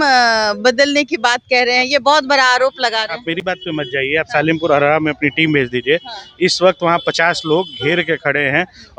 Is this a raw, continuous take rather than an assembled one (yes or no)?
yes